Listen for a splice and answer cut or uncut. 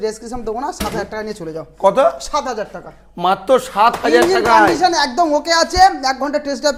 uncut